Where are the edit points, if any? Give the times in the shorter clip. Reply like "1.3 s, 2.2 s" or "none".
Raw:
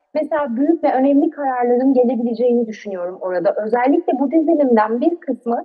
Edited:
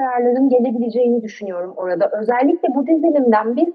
none